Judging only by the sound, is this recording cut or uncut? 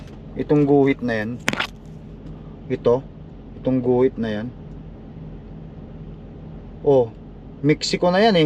uncut